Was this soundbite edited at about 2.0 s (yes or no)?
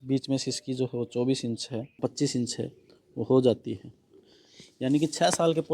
yes